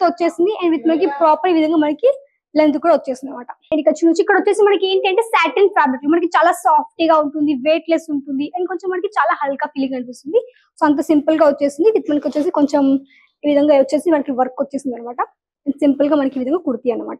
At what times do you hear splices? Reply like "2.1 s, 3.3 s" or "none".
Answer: 3.7 s